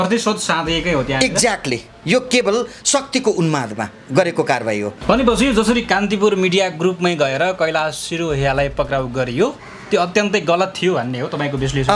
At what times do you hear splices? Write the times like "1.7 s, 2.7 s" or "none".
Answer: 5.0 s